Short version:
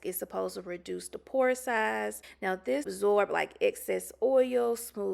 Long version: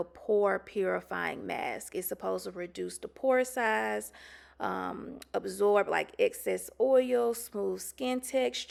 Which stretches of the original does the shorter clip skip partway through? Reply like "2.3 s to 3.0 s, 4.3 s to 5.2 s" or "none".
4.5 s to 5.2 s